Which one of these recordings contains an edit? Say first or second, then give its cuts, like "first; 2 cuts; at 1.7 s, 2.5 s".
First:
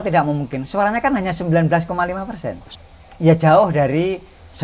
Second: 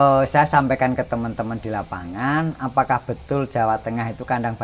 first; 1 cut; at 2.7 s